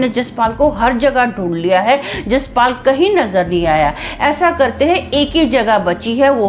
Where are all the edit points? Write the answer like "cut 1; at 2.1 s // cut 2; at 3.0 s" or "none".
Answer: none